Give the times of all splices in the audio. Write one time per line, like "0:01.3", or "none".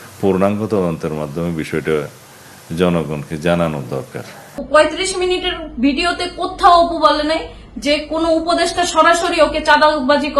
0:04.6